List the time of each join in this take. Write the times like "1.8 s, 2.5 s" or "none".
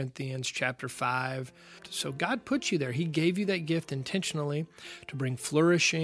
1.9 s